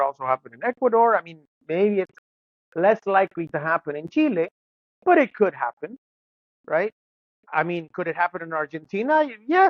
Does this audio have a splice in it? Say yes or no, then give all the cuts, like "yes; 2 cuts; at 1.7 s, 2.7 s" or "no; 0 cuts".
no; 0 cuts